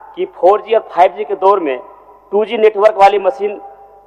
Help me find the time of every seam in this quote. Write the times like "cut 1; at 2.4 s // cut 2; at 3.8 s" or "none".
none